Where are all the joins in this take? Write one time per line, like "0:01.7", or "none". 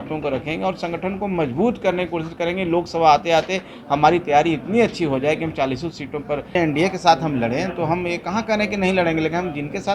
0:06.5